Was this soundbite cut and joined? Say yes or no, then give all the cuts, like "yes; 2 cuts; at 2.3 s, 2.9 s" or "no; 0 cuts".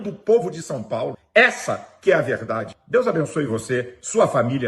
yes; 2 cuts; at 1.2 s, 2.7 s